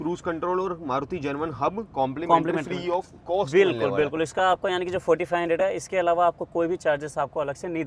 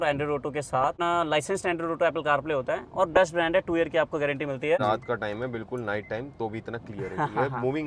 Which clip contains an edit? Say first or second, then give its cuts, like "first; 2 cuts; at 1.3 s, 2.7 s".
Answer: second; 2 cuts; at 1.0 s, 4.8 s